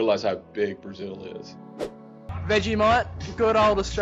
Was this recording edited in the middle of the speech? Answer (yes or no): yes